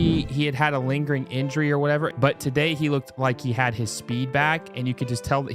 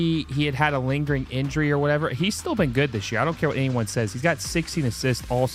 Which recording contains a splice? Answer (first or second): first